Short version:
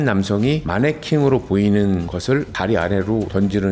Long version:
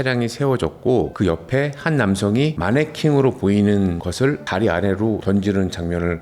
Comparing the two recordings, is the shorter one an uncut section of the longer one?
yes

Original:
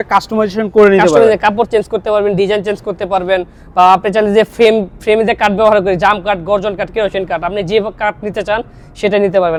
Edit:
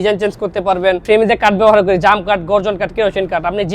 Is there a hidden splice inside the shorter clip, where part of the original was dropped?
yes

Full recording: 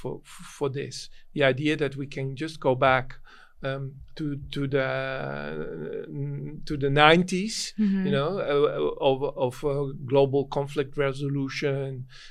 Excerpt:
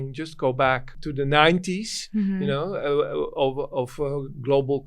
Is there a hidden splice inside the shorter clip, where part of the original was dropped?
yes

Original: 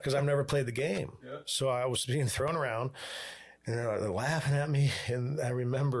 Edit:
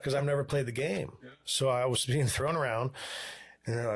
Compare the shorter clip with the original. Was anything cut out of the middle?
no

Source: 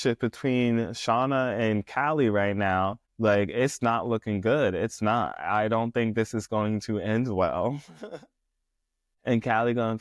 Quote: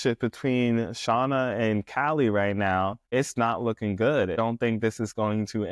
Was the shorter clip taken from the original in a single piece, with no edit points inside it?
no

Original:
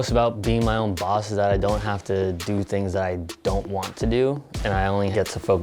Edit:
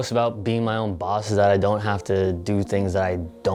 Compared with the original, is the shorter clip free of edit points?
yes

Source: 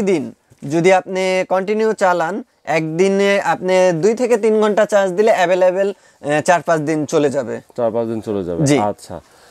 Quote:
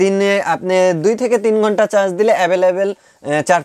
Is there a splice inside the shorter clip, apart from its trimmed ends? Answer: no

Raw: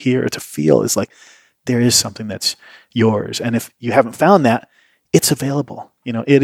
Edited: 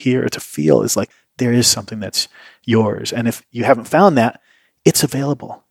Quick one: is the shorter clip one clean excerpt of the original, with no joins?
no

